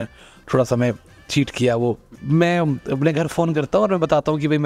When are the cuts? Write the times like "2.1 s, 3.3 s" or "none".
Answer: 2.1 s